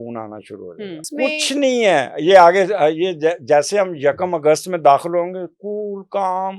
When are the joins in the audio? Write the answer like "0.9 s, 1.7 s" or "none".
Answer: 1.1 s